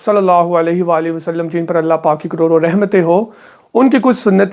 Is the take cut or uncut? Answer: uncut